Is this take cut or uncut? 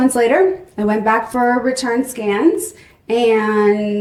uncut